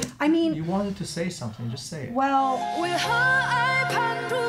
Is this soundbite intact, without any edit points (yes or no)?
no